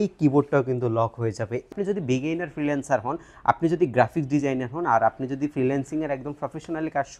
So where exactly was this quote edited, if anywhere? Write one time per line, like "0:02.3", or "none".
0:01.7